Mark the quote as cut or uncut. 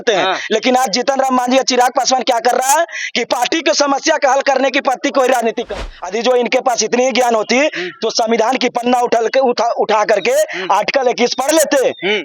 cut